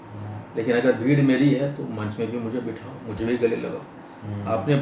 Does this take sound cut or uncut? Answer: uncut